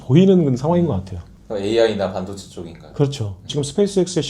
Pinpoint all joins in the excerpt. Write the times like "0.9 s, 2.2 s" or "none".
3.4 s